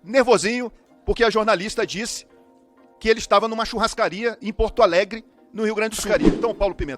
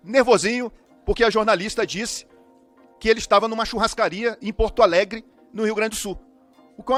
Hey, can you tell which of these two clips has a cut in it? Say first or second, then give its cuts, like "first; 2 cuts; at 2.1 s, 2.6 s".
first; 1 cut; at 6.0 s